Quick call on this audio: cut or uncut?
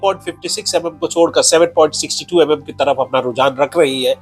uncut